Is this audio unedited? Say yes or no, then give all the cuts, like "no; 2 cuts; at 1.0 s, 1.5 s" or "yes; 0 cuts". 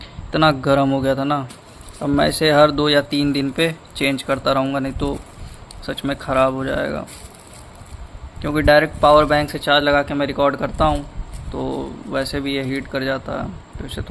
yes; 0 cuts